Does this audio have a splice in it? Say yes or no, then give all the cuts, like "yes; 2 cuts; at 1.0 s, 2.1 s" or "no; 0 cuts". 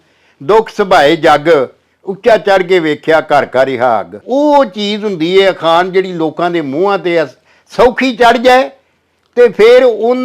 yes; 1 cut; at 4.2 s